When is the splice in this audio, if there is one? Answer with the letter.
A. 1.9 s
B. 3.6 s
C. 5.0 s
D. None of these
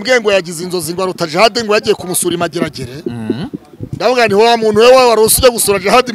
D